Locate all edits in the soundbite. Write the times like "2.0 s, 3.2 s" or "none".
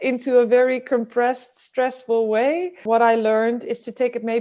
2.8 s

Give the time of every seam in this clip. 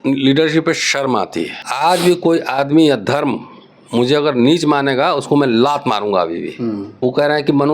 1.6 s, 7.0 s

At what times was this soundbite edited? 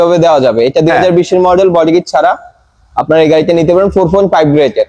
none

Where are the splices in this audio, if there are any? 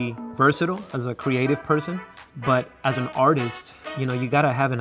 0.9 s

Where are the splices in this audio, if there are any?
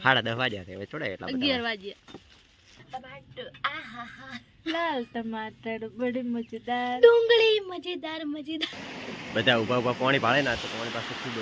2.8 s, 8.8 s

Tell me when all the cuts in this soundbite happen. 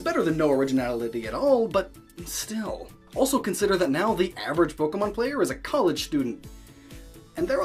none

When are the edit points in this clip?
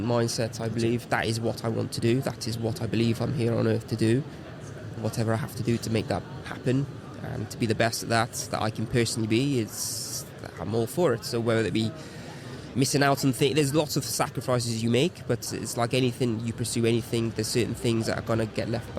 1.0 s, 5.0 s, 15.4 s

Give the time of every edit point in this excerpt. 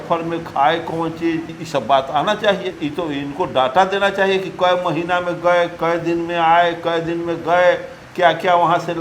1.5 s, 2.7 s

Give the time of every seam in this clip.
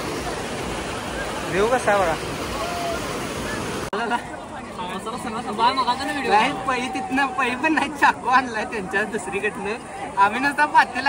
3.9 s

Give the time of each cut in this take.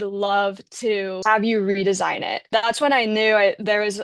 1.2 s, 2.5 s

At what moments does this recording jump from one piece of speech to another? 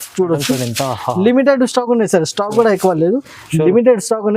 none

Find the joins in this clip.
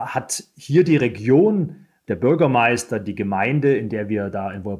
2.1 s

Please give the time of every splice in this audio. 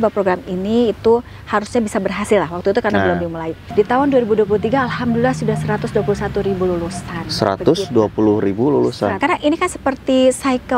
3.6 s, 9.2 s

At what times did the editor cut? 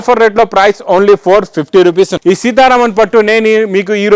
2.1 s

